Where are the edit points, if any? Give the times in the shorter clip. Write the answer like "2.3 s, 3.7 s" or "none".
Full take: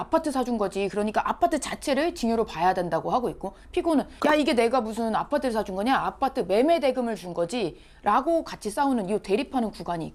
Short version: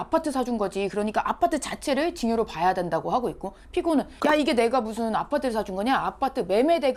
none